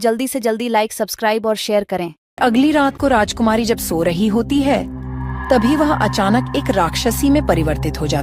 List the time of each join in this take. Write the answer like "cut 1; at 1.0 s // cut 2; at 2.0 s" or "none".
cut 1; at 2.4 s